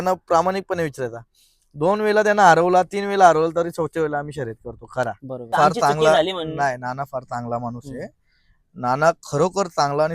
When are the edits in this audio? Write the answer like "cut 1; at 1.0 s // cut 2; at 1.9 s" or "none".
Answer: cut 1; at 5.6 s